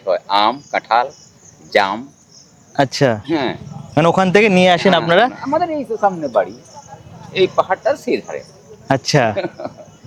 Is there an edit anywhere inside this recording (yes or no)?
no